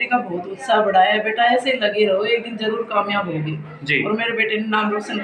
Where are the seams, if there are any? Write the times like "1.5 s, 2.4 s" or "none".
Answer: none